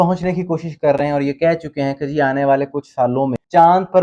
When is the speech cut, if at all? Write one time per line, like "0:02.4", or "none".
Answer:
none